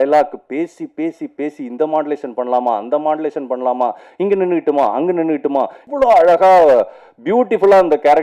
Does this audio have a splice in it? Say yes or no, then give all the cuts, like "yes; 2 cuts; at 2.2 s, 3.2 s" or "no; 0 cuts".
yes; 1 cut; at 5.8 s